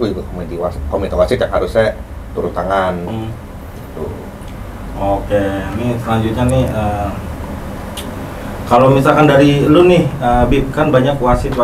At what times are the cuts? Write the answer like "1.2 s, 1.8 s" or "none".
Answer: none